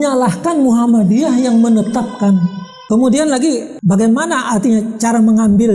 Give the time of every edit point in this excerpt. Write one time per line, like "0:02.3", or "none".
0:02.7